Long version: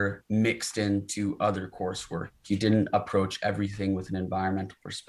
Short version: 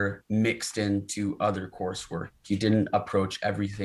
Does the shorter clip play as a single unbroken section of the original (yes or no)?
yes